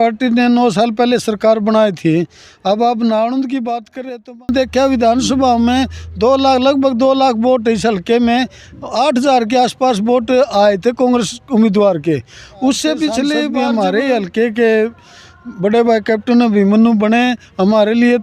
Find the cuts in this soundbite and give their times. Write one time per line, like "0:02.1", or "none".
0:04.5
0:13.5